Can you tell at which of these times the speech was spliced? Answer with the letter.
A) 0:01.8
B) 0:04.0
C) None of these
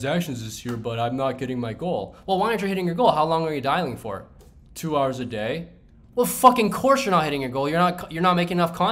C